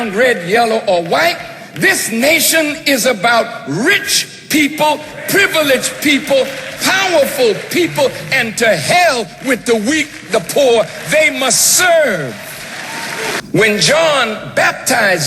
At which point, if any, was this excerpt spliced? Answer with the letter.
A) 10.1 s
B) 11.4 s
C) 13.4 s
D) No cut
C